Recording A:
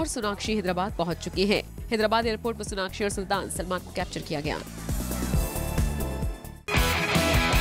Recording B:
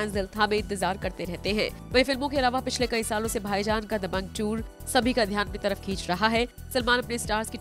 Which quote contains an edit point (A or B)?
A